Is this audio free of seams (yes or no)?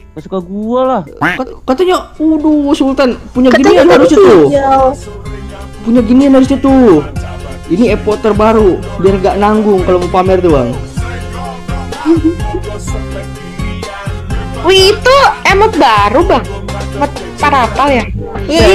yes